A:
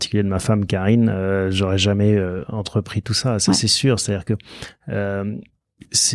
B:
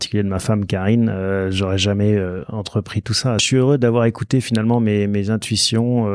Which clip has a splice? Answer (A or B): B